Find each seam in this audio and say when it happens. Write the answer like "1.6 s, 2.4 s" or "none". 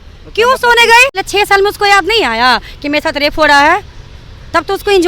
1.2 s